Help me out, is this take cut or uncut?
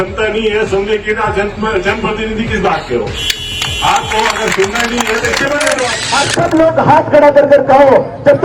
cut